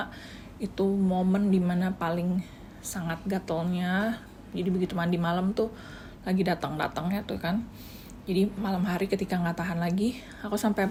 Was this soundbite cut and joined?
no; 0 cuts

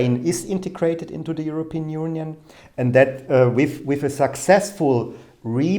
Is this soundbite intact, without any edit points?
yes; 0 cuts

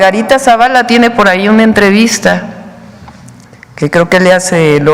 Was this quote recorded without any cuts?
yes; 0 cuts

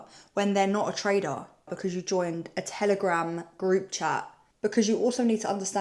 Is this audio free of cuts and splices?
no; 2 cuts; at 1.7 s, 4.5 s

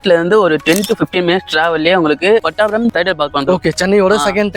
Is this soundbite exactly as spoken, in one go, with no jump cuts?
yes; 0 cuts

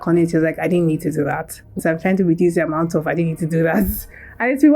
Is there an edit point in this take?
yes; 1 cut; at 1.7 s

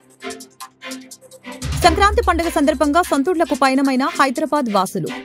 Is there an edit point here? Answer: yes; 1 cut; at 1.1 s

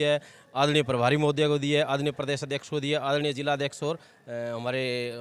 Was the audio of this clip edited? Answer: no; 0 cuts

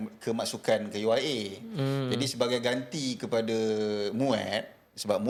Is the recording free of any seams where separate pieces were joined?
yes; 0 cuts

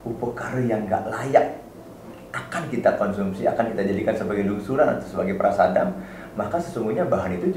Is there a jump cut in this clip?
no; 0 cuts

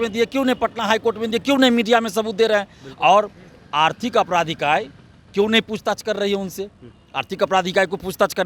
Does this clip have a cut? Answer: no; 0 cuts

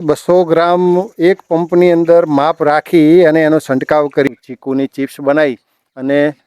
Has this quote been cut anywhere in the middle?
yes; 1 cut; at 4.3 s

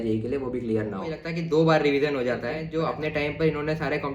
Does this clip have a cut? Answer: yes; 2 cuts; at 1.3 s, 2.7 s

